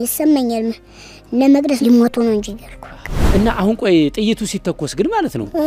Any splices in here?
yes; 1 cut; at 3.2 s

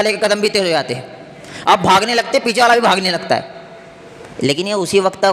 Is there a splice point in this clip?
no; 0 cuts

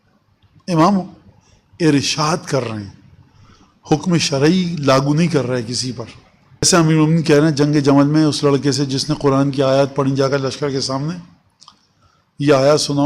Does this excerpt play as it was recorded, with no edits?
no; 1 cut; at 6.7 s

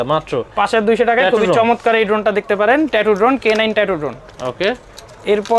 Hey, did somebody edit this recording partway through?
no; 0 cuts

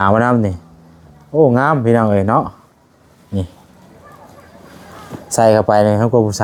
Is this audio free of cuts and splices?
yes; 0 cuts

